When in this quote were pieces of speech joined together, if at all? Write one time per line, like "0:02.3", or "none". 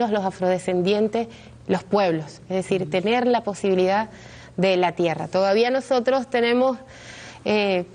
none